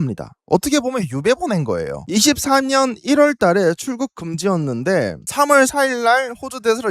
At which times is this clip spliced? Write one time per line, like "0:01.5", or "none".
0:02.0